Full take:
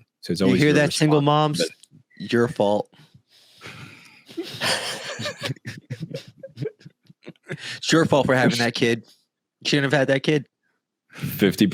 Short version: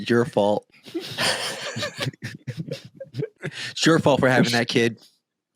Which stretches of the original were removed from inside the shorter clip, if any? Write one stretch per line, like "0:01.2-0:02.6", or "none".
0:03.3-0:04.5
0:07.1-0:07.7